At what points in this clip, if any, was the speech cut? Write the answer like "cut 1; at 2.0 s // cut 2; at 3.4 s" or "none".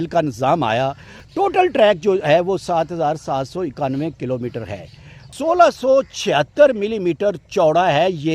cut 1; at 1.1 s // cut 2; at 5.3 s